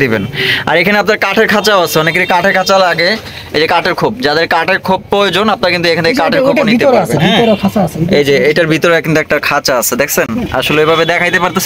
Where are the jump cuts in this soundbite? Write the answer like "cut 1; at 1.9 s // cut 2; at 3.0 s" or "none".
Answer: none